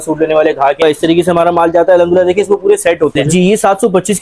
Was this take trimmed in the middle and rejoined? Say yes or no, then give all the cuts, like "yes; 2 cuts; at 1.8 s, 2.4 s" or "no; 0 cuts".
yes; 2 cuts; at 0.8 s, 3.2 s